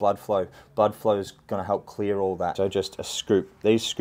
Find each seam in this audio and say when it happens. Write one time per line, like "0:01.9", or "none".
0:02.5